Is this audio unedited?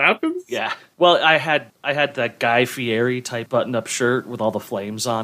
no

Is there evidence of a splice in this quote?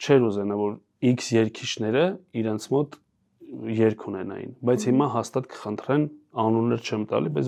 no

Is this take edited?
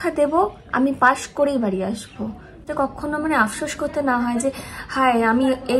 yes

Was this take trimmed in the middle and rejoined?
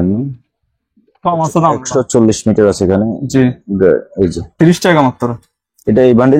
no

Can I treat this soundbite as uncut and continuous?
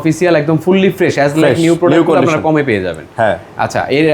yes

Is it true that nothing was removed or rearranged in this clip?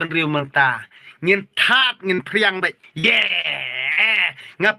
no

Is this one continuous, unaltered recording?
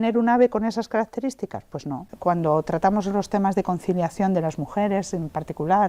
no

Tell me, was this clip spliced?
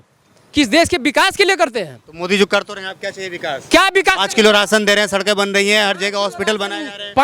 no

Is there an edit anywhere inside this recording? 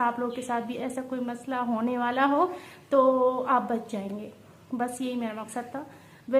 no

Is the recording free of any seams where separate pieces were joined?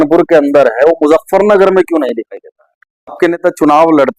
no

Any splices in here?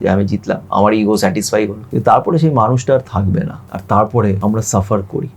yes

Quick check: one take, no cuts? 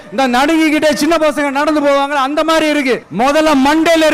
no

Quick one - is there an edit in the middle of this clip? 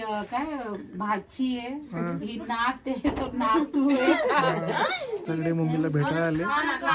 yes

